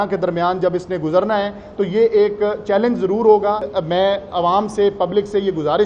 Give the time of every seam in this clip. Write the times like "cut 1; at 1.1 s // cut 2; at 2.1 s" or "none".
cut 1; at 3.7 s